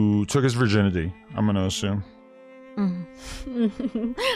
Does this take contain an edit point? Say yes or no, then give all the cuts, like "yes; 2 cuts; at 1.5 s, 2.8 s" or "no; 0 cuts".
no; 0 cuts